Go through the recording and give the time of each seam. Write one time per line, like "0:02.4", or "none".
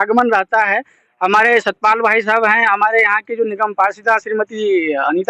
none